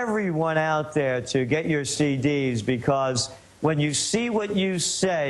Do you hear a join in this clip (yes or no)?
no